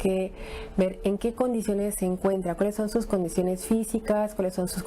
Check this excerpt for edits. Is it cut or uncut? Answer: uncut